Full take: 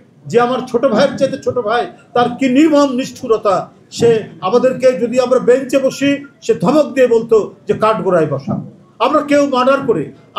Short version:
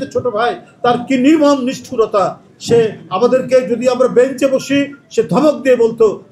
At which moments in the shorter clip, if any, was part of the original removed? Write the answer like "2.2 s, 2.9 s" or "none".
none